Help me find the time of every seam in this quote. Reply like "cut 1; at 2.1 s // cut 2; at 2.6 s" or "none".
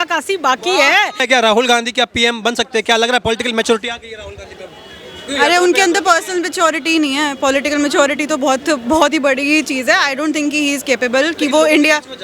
cut 1; at 1.2 s